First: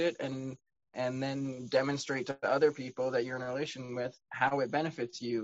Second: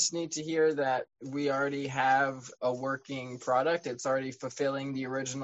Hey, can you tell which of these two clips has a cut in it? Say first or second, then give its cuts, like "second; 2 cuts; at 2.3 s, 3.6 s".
second; 2 cuts; at 1.1 s, 2.5 s